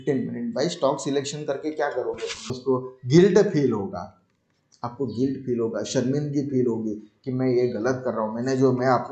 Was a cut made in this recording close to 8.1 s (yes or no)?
no